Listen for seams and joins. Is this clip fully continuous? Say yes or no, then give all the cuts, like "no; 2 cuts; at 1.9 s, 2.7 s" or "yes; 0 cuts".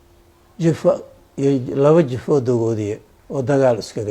yes; 0 cuts